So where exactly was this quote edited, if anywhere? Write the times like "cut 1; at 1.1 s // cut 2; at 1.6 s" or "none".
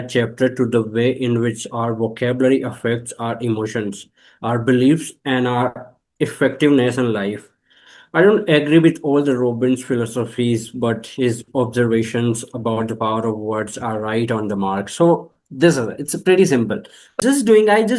none